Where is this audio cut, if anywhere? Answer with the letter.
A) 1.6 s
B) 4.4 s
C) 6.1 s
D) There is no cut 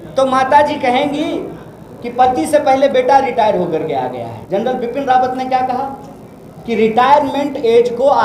B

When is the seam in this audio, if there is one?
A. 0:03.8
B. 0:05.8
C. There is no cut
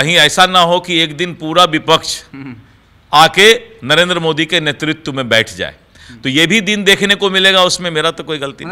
C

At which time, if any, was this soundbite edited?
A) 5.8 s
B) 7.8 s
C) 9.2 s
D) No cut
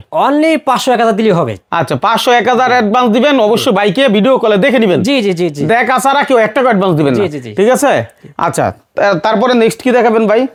D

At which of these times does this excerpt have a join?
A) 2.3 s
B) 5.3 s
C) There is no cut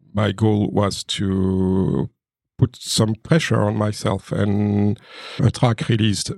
B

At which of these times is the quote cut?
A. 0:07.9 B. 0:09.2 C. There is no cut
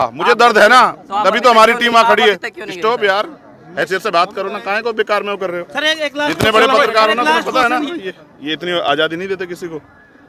A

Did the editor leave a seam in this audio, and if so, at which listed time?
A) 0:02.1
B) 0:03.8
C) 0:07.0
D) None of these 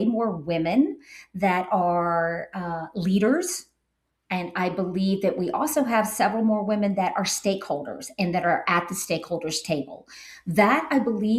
D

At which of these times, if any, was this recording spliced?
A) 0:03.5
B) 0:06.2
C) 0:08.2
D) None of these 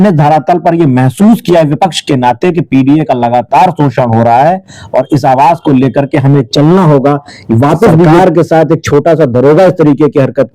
C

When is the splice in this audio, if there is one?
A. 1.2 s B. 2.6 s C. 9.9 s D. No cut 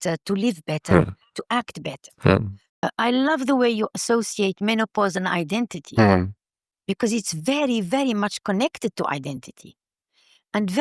B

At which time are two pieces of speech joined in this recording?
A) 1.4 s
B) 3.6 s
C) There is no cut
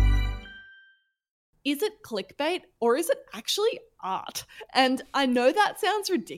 A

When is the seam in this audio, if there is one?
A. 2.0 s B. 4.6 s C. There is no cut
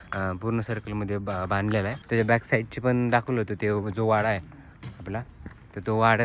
A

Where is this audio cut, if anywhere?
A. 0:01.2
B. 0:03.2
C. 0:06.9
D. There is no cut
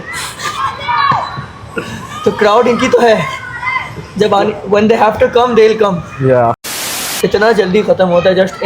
C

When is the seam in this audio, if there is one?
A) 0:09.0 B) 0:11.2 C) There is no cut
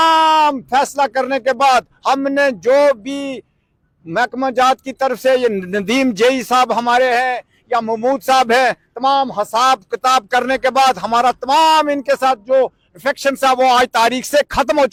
C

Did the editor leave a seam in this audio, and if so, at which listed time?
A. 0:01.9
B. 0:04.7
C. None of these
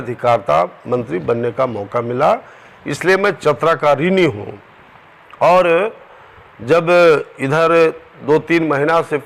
C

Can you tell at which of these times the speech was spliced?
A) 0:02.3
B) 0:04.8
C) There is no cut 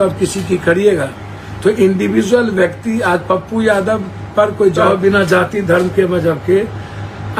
B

